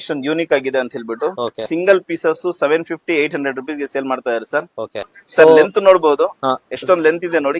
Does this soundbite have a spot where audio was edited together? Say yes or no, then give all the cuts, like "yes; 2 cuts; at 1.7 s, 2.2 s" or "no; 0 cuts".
yes; 2 cuts; at 1.6 s, 5.1 s